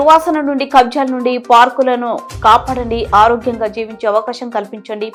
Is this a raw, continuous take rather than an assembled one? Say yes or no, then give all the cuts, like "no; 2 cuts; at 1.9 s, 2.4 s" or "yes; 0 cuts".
yes; 0 cuts